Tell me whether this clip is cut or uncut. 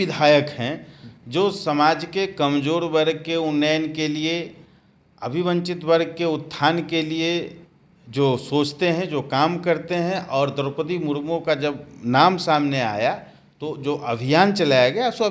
uncut